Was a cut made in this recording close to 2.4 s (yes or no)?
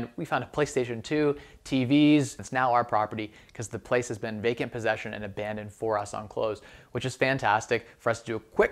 yes